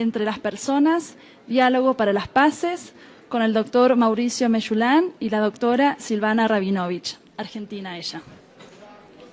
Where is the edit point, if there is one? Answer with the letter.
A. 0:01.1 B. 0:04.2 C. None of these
C